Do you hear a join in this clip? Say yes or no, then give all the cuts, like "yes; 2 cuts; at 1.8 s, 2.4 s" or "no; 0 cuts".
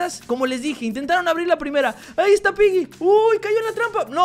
no; 0 cuts